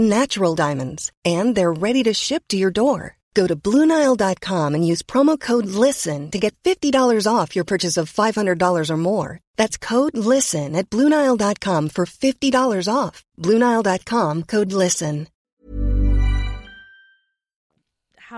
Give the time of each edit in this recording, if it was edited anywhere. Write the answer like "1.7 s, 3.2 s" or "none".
none